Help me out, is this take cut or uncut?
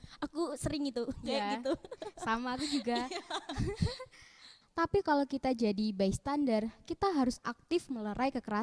cut